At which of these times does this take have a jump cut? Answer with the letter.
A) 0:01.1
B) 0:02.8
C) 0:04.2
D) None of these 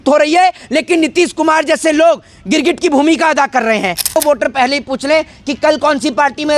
C